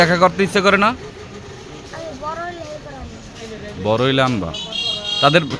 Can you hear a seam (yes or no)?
no